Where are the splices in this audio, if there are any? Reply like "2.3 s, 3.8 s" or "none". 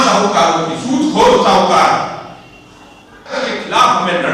3.4 s